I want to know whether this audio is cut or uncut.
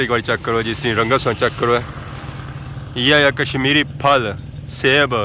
uncut